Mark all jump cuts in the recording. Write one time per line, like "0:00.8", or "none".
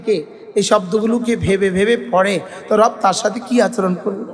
none